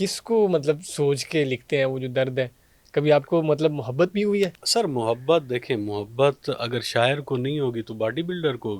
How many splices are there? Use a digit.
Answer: 1